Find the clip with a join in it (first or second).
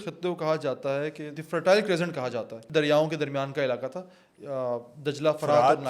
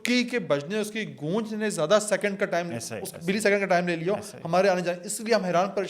first